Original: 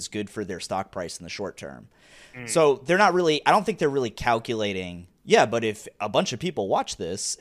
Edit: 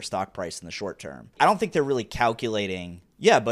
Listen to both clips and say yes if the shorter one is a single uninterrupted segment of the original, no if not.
no